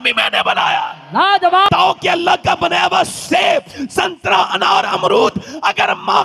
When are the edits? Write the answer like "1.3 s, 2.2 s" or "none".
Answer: 1.6 s